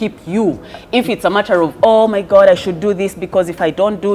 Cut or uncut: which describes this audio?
uncut